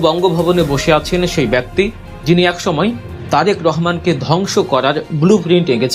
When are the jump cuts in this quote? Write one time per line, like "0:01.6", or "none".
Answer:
0:02.1